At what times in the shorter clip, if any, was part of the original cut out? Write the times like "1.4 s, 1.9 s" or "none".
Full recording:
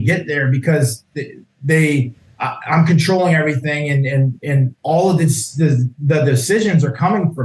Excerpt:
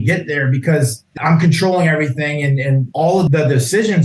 1.1 s, 3.0 s